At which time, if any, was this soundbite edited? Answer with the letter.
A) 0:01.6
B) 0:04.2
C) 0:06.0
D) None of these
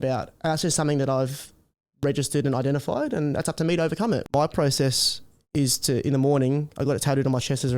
B